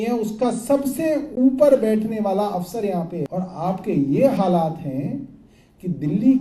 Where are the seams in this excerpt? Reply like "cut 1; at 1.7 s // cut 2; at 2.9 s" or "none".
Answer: cut 1; at 3.3 s

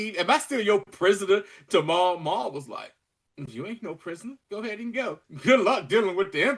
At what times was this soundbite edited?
cut 1; at 4.4 s // cut 2; at 5.3 s

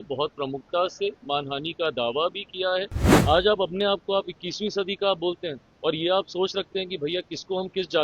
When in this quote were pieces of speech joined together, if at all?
cut 1; at 3.0 s

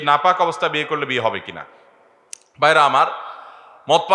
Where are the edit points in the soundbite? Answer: none

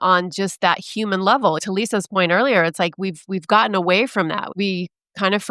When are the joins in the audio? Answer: cut 1; at 1.6 s // cut 2; at 4.5 s

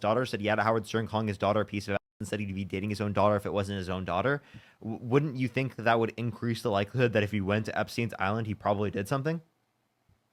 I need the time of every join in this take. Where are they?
none

